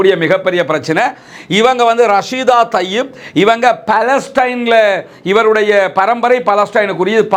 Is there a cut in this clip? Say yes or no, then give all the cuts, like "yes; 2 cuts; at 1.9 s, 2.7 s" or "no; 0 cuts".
no; 0 cuts